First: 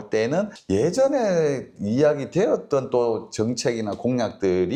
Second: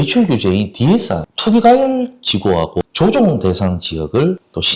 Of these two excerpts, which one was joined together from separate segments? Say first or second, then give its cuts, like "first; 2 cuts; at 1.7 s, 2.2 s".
second; 2 cuts; at 1.3 s, 2.8 s